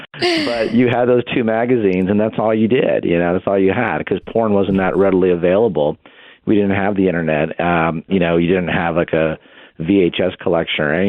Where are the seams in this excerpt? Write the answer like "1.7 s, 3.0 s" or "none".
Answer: 8.1 s